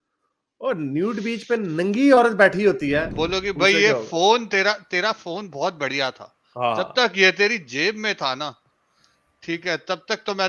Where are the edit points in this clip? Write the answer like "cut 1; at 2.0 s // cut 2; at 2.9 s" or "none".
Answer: cut 1; at 3.1 s